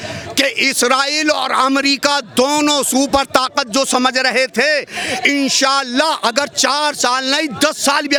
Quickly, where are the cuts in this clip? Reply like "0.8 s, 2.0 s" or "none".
none